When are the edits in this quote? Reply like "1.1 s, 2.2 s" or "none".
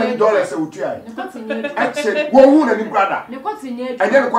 none